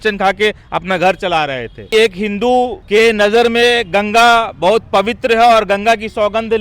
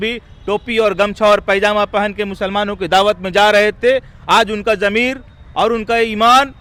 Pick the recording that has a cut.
first; 2 cuts; at 1.8 s, 2.8 s

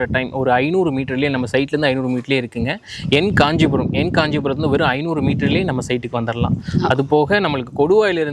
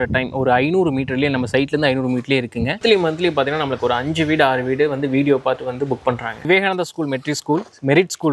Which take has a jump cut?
second; 2 cuts; at 2.8 s, 6.5 s

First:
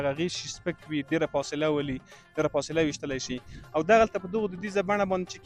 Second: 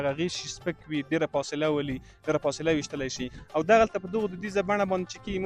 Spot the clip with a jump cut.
second; 2 cuts; at 2.1 s, 3.3 s

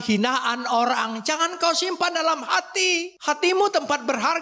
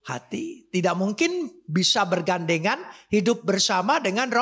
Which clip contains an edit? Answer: first; 1 cut; at 3.1 s

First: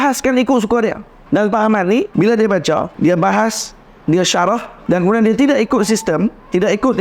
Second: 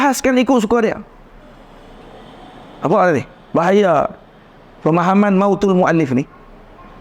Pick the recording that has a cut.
first; 4 cuts; at 1.1 s, 2.1 s, 2.9 s, 4.7 s

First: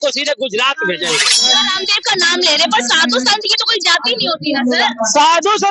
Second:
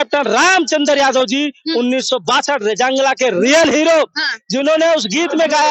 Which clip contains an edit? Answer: first; 1 cut; at 1.6 s

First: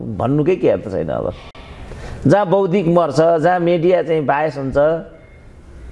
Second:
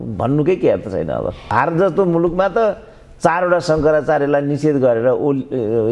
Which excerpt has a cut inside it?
second; 1 cut; at 1.4 s

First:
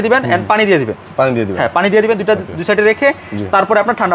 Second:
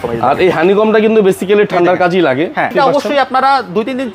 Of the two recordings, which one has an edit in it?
second; 1 cut; at 2.7 s

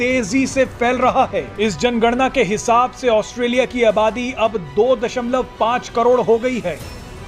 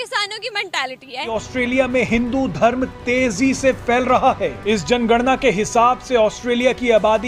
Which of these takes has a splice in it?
second; 1 cut; at 1.3 s

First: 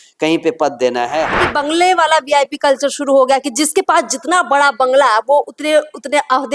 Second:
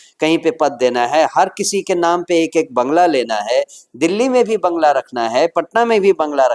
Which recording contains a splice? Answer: first; 1 cut; at 1.4 s

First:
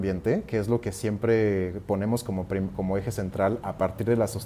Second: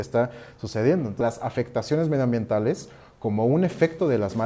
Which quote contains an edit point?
second; 1 cut; at 1.2 s

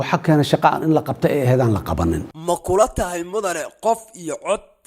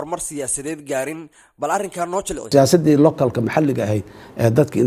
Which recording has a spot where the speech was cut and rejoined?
first; 1 cut; at 2.3 s

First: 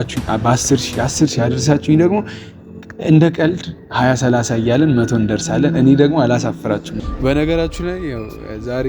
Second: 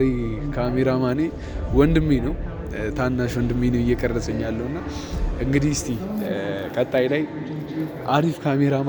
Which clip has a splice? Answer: first; 1 cut; at 6.9 s

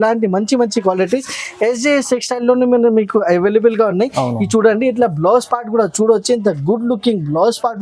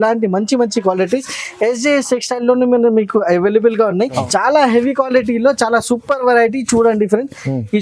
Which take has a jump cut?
second; 1 cut; at 4.2 s

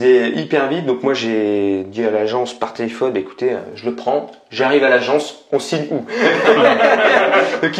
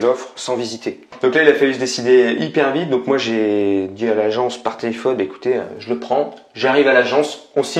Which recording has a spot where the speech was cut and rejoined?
second; 1 cut; at 1.1 s

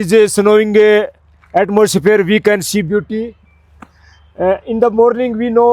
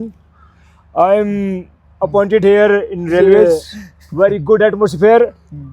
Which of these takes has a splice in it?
second; 1 cut; at 3.5 s

